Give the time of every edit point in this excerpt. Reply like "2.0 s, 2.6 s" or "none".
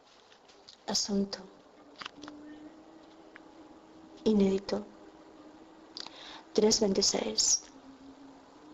none